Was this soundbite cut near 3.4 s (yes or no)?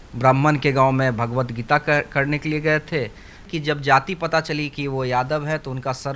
yes